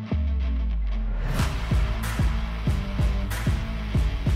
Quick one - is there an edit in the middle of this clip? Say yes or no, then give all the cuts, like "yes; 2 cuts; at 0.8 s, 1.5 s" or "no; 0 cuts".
no; 0 cuts